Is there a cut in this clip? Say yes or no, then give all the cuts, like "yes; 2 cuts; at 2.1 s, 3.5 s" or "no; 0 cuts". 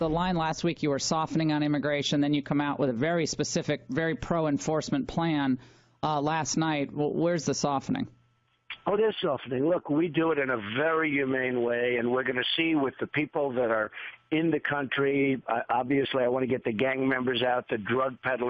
yes; 1 cut; at 8.4 s